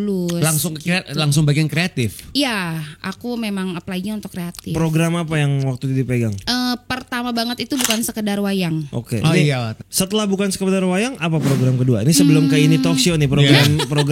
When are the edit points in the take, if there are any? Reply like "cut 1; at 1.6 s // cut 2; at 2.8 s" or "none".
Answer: cut 1; at 9.7 s